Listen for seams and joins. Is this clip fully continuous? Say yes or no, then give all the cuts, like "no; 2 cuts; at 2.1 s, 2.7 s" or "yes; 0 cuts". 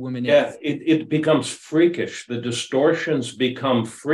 yes; 0 cuts